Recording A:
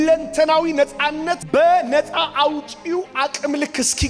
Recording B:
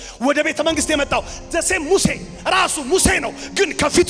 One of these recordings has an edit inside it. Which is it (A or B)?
A